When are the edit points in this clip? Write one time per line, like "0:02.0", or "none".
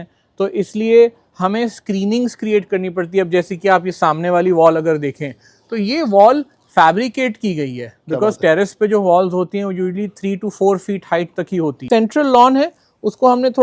0:11.8